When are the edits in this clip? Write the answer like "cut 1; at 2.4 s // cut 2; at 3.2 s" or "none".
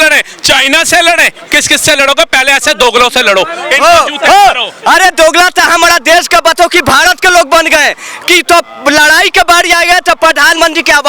none